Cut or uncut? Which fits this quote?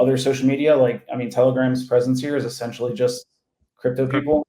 uncut